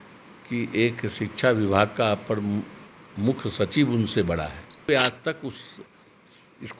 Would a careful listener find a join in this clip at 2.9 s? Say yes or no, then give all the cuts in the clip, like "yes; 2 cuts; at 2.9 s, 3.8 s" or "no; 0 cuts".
no; 1 cut; at 4.9 s